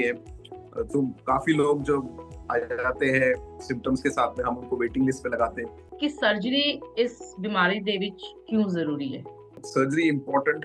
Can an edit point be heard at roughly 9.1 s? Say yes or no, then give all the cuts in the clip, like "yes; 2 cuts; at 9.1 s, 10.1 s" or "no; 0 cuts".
no; 1 cut; at 5.8 s